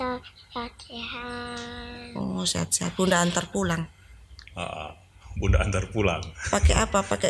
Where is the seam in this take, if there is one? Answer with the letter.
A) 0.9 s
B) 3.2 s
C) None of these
C